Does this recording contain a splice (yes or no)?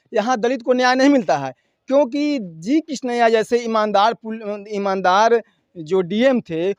no